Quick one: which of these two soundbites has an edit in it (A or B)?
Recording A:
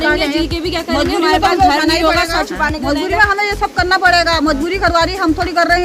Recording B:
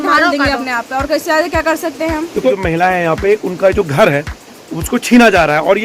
B